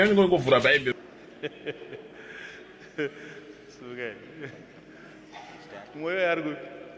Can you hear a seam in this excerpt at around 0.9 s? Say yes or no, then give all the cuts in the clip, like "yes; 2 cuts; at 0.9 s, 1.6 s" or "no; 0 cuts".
yes; 1 cut; at 0.9 s